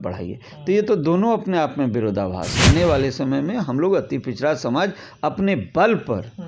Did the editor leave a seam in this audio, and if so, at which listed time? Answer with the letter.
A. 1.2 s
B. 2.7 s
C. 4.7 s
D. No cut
B